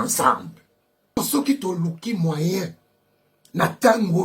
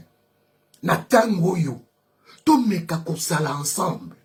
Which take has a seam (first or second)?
first